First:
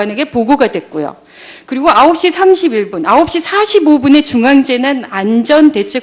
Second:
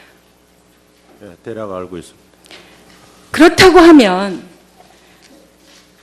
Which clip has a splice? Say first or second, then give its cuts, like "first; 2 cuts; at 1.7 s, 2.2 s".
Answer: second; 1 cut; at 2.3 s